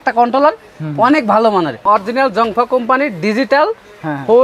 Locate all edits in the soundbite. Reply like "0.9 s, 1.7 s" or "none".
1.8 s